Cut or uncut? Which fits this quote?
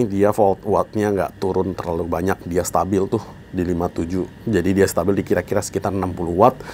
uncut